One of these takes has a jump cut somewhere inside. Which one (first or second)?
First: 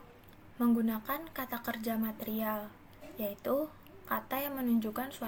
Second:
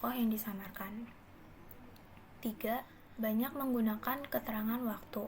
second